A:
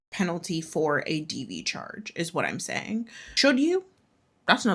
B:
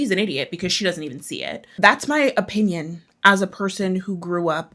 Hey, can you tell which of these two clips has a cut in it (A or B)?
B